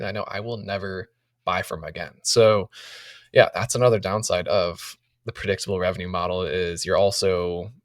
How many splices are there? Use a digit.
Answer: 1